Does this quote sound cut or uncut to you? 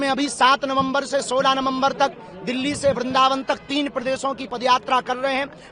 uncut